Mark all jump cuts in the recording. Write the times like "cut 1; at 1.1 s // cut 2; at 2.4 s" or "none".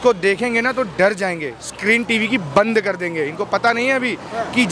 none